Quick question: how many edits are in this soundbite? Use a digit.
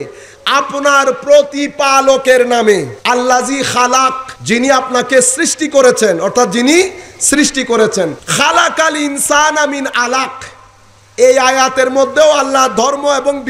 3